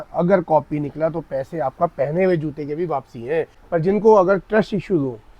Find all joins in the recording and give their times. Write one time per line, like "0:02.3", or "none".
0:03.6